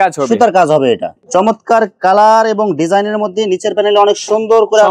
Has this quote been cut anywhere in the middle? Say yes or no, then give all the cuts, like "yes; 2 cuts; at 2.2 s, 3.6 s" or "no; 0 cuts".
yes; 1 cut; at 1.1 s